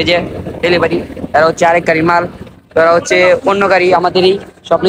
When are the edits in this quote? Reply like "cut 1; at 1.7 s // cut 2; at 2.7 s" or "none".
none

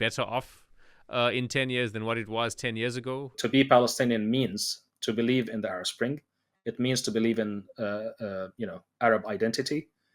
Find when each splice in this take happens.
cut 1; at 3.3 s

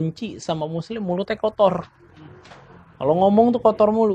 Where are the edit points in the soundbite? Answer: none

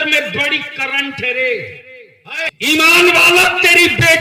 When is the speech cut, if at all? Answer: cut 1; at 2.5 s

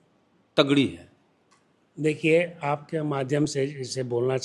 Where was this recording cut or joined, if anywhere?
none

